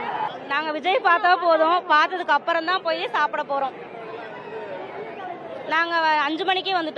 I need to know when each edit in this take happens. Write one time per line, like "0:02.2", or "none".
none